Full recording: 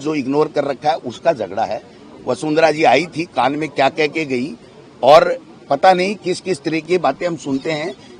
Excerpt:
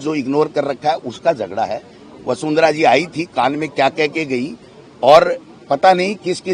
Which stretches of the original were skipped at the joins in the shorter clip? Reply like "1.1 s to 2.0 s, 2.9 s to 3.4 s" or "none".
none